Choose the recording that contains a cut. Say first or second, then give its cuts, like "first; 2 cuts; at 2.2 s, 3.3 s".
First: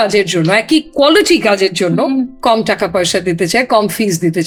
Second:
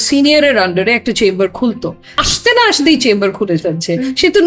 second; 1 cut; at 2.2 s